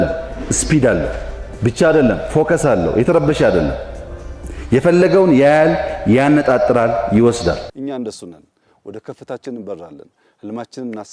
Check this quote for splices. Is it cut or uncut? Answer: cut